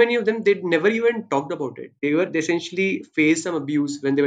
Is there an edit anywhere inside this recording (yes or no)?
no